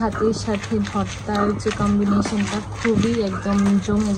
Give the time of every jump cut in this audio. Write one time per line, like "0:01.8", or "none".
none